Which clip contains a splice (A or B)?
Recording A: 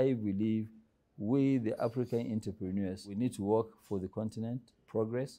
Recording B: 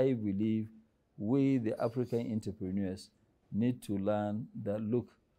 A